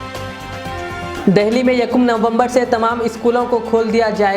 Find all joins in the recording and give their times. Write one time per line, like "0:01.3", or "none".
0:00.9